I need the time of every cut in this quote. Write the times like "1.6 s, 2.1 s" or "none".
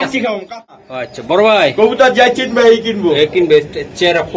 0.9 s